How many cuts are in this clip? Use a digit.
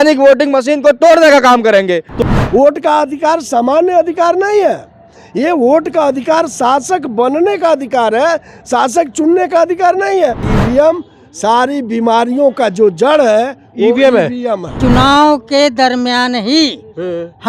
3